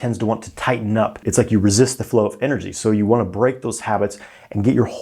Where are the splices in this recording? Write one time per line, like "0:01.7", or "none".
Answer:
0:01.2